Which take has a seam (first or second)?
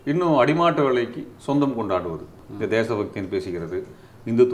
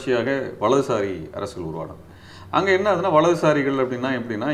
first